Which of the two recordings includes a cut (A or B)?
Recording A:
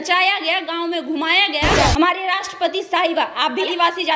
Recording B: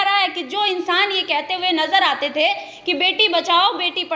A